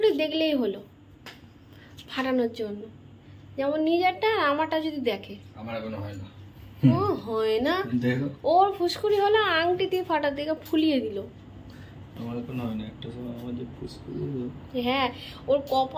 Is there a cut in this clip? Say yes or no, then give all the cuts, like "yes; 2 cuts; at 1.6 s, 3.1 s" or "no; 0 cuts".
no; 0 cuts